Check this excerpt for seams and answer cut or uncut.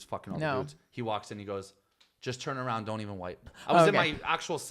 cut